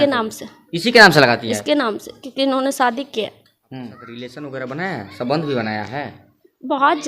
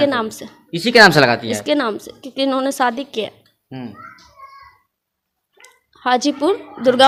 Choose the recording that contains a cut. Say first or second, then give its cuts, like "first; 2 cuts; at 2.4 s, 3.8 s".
first; 1 cut; at 4.1 s